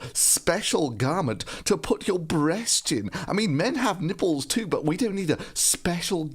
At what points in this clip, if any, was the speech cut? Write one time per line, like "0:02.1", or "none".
0:03.4